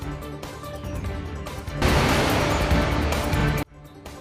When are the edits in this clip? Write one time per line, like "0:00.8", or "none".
none